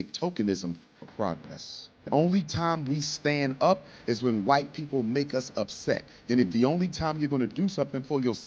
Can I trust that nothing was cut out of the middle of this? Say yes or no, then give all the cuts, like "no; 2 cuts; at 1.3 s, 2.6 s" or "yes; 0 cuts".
no; 1 cut; at 2.1 s